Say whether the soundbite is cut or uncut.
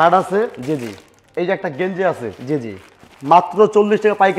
uncut